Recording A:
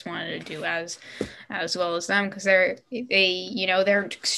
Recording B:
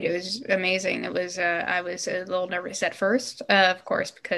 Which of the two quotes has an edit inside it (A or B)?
B